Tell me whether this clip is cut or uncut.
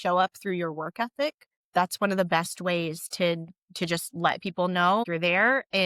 cut